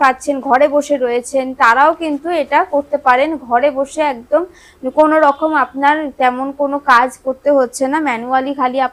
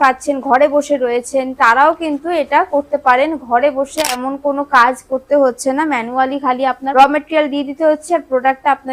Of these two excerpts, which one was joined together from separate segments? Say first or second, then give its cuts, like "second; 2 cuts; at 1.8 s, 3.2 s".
second; 2 cuts; at 4.2 s, 6.8 s